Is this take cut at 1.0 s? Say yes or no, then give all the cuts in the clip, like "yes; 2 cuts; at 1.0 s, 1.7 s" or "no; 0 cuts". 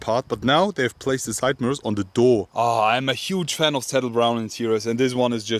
no; 1 cut; at 2.5 s